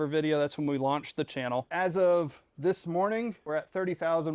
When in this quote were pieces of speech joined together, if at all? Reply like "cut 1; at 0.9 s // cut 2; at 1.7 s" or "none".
cut 1; at 1.7 s // cut 2; at 3.5 s